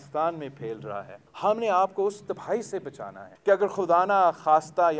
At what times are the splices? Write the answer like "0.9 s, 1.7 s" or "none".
3.3 s